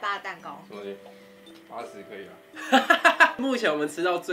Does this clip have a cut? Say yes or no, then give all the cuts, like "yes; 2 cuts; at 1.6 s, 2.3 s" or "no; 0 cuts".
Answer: yes; 1 cut; at 3.4 s